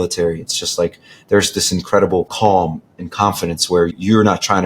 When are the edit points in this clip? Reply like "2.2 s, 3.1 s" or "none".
2.3 s, 3.9 s

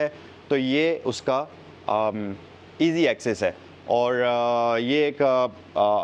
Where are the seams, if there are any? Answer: none

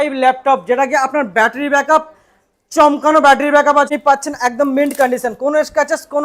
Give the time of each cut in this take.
3.9 s

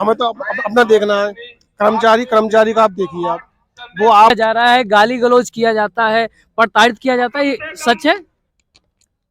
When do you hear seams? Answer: 4.3 s

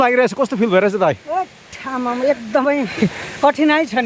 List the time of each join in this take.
2.9 s

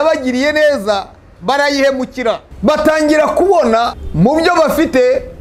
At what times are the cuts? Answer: 2.5 s, 4.0 s

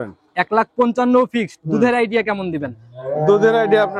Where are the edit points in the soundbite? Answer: none

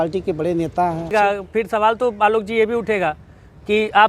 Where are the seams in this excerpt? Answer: 1.1 s

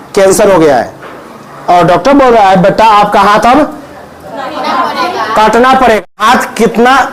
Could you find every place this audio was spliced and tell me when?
6.0 s

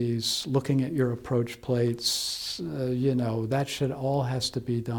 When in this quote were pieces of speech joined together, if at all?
none

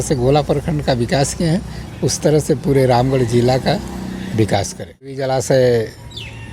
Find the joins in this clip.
5.2 s

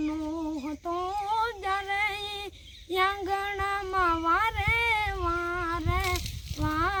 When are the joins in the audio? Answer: none

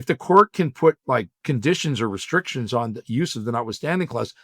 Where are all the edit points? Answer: 1.3 s

